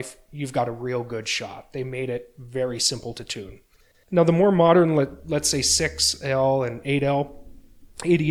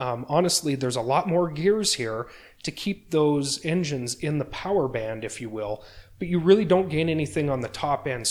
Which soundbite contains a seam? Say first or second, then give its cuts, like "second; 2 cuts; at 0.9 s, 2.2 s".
first; 1 cut; at 3.9 s